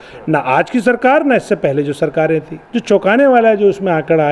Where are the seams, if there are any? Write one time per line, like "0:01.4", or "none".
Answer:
0:02.6

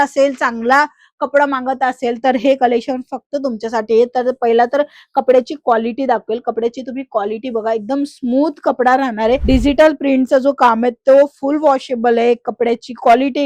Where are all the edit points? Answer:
0:09.4

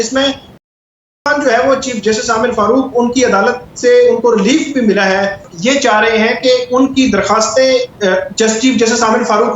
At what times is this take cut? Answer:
0:05.5

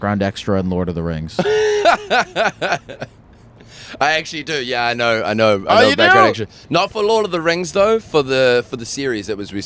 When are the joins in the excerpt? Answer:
none

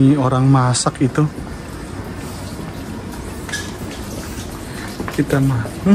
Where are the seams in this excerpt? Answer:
none

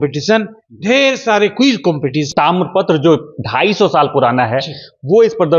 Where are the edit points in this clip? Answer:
0:02.3

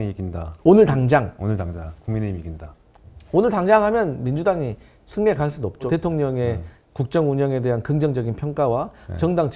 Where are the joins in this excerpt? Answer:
0:05.9

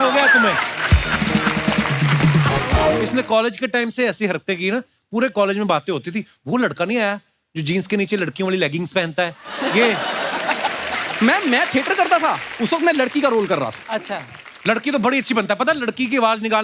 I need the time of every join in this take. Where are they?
0:03.0

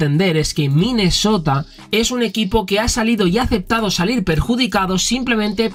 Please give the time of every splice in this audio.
none

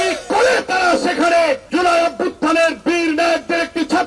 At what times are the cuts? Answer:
0:01.6

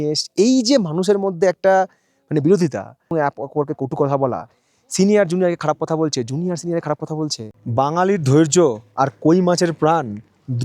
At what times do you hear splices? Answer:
0:07.4

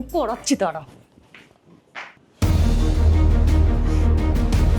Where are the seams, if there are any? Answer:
0:02.2

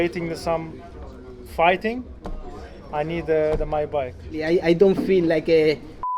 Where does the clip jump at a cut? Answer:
0:04.4

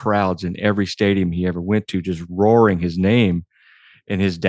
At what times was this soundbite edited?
none

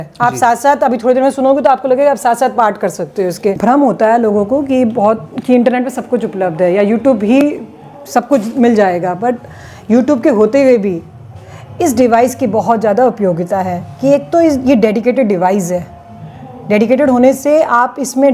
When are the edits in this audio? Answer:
0:03.6

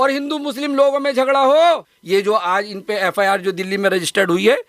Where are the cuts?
0:01.9

